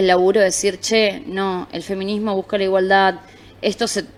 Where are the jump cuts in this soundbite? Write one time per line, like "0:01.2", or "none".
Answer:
none